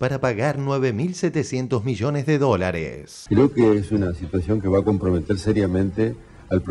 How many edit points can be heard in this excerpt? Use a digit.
1